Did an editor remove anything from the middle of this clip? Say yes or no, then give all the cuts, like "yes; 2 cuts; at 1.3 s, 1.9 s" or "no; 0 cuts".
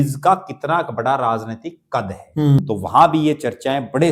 yes; 1 cut; at 2.6 s